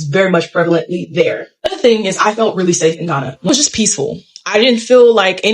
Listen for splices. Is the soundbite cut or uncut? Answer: cut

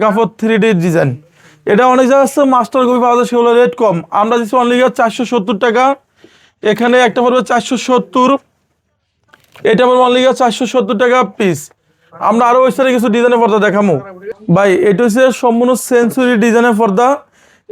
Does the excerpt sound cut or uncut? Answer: uncut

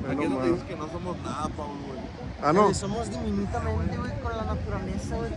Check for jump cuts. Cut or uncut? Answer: uncut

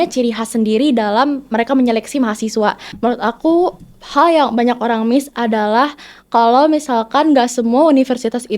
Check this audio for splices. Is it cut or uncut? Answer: cut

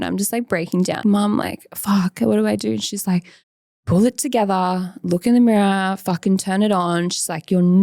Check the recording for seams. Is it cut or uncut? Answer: cut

